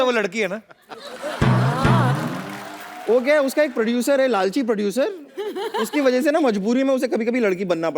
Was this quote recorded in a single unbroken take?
yes; 0 cuts

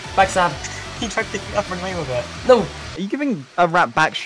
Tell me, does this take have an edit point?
no; 0 cuts

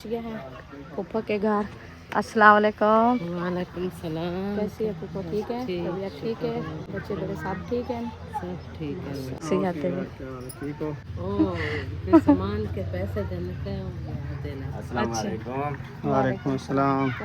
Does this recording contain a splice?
yes; 2 cuts; at 9.4 s, 11.2 s

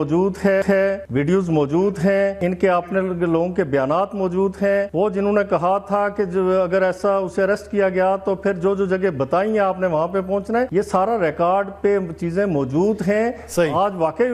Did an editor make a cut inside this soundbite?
yes; 4 cuts; at 1.0 s, 2.4 s, 4.9 s, 10.7 s

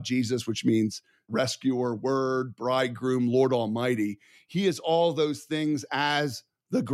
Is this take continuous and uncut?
no; 1 cut; at 1.3 s

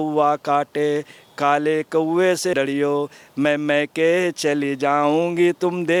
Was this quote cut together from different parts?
no; 0 cuts

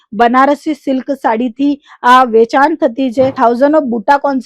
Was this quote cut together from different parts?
yes; 1 cut; at 3.3 s

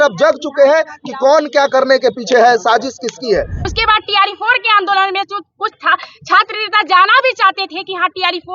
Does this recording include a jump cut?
yes; 1 cut; at 3.6 s

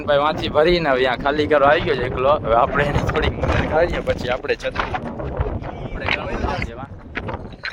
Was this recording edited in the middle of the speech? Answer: no; 0 cuts

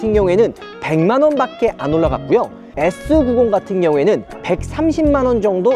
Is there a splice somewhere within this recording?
yes; 1 cut; at 2.6 s

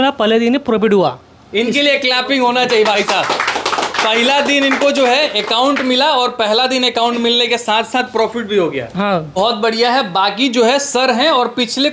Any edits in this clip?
no; 0 cuts

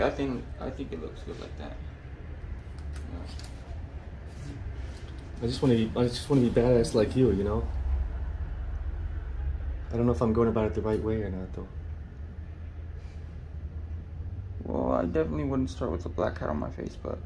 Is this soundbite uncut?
yes; 0 cuts

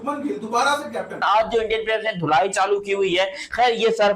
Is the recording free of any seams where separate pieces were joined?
no; 1 cut; at 1.2 s

